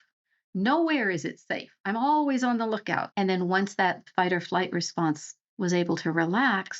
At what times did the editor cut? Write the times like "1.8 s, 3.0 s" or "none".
3.1 s, 4.0 s